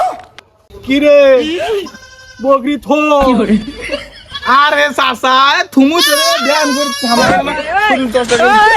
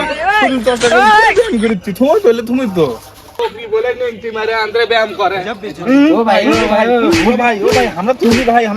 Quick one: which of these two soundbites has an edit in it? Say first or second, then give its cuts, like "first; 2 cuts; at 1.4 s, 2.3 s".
second; 1 cut; at 3.4 s